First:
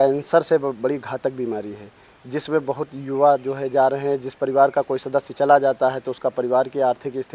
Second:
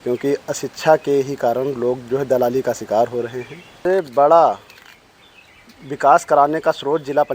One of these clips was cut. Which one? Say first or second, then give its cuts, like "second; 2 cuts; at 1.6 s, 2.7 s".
second; 1 cut; at 3.8 s